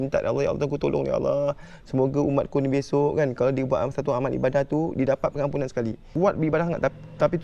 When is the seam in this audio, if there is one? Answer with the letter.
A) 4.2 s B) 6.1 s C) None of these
B